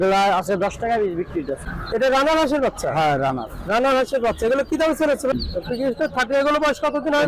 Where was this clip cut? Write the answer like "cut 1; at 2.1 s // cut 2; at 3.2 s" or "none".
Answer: cut 1; at 1.7 s // cut 2; at 5.3 s